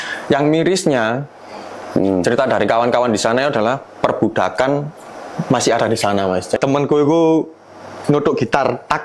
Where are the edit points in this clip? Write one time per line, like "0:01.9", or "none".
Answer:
0:06.6